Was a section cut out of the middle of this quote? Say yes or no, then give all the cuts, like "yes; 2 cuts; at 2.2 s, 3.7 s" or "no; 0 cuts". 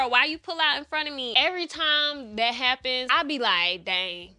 yes; 2 cuts; at 1.3 s, 3.1 s